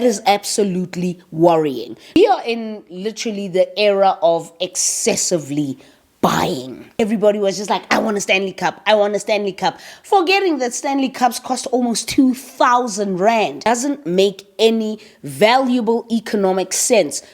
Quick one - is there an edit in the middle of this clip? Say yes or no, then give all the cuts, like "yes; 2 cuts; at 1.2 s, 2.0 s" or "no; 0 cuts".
yes; 3 cuts; at 2.2 s, 6.9 s, 13.7 s